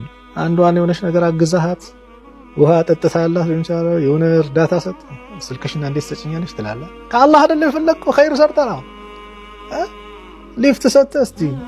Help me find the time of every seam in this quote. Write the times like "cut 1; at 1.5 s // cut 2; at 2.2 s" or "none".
none